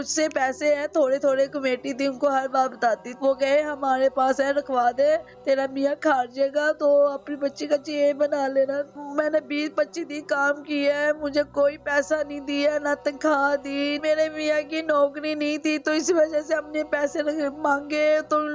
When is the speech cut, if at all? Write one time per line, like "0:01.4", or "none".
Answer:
0:03.1
0:08.9
0:14.0